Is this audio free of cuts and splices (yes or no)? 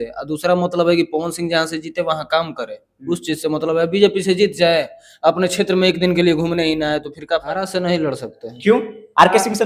no